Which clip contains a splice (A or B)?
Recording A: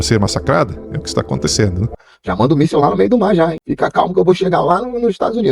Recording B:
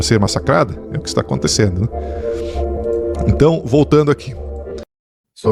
A